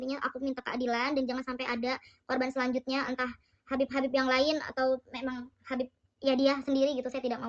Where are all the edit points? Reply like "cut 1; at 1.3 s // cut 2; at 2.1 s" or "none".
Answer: none